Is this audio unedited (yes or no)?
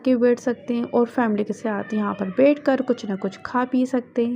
yes